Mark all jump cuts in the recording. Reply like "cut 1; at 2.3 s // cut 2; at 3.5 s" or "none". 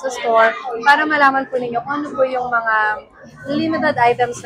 none